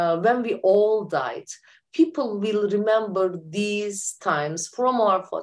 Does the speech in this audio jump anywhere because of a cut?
no; 0 cuts

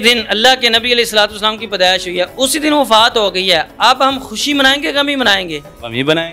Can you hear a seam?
no; 0 cuts

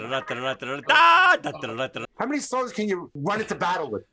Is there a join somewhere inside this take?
yes; 2 cuts; at 2.0 s, 3.2 s

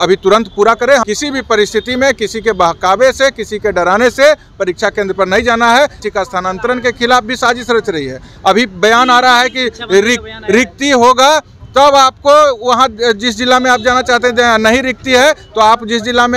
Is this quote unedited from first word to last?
no; 2 cuts; at 1.0 s, 6.0 s

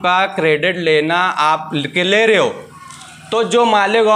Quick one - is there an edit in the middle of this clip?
no; 0 cuts

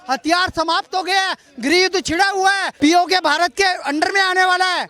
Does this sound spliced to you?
yes; 1 cut; at 2.7 s

